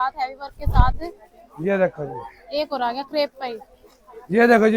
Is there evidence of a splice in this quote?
no; 0 cuts

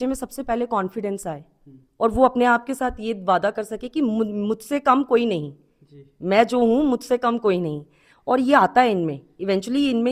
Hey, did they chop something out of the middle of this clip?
no; 0 cuts

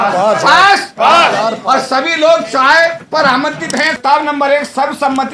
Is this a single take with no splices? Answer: no; 1 cut; at 4.0 s

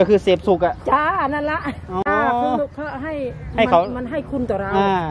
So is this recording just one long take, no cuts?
no; 1 cut; at 2.0 s

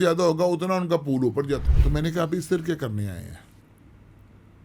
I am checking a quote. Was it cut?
yes; 1 cut; at 1.7 s

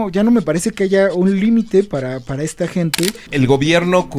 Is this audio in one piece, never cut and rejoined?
no; 1 cut; at 3.2 s

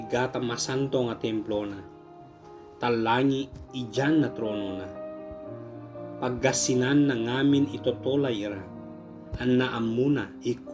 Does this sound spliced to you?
no; 0 cuts

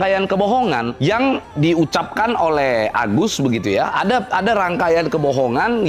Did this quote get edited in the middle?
no; 0 cuts

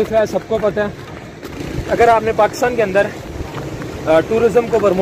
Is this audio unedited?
no; 1 cut; at 1.6 s

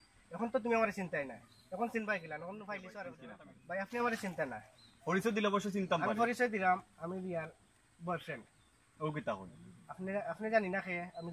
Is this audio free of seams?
no; 1 cut; at 3.2 s

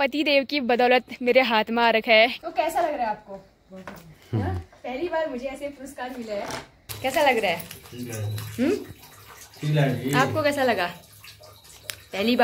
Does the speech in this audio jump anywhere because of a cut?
yes; 2 cuts; at 2.4 s, 6.8 s

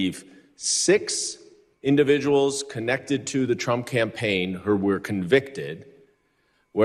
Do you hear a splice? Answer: no; 0 cuts

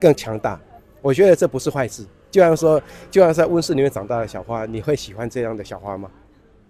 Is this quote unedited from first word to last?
yes; 0 cuts

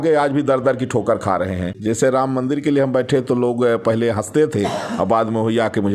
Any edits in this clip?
yes; 1 cut; at 1.8 s

